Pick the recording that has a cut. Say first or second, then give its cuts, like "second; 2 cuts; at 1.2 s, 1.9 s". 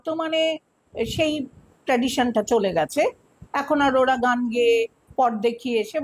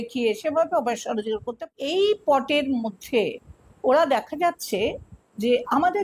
second; 1 cut; at 1.6 s